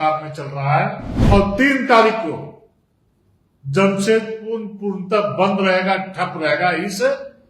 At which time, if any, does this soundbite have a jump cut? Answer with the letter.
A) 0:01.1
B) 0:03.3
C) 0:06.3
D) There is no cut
A